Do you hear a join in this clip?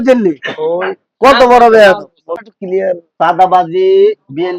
yes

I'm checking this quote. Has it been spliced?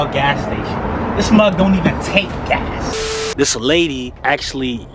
yes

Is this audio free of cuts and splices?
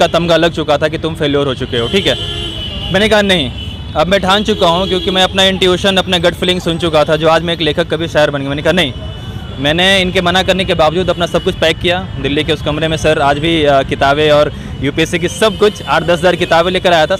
yes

